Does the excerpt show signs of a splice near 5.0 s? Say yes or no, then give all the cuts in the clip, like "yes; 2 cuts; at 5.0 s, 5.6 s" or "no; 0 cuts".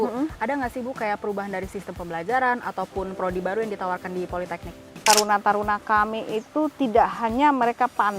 yes; 1 cut; at 5.0 s